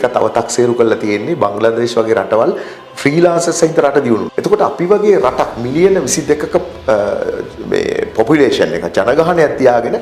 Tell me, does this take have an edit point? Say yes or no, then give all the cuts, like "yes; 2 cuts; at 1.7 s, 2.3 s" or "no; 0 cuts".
yes; 1 cut; at 4.3 s